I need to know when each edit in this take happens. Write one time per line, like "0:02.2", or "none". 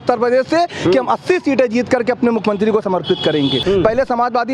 0:03.6